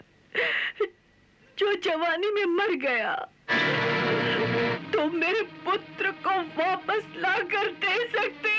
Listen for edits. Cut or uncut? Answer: cut